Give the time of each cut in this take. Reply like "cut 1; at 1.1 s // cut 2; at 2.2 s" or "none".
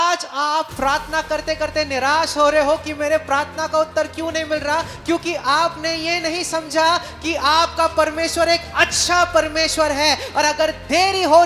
none